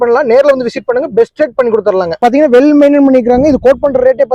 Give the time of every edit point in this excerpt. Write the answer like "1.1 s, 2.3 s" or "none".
2.2 s